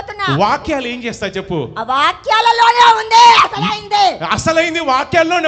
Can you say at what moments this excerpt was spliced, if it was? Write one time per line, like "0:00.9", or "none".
none